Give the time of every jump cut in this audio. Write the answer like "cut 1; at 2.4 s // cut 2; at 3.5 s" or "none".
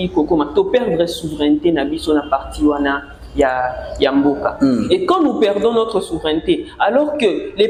none